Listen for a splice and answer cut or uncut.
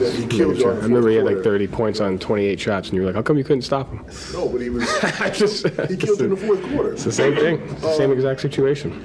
uncut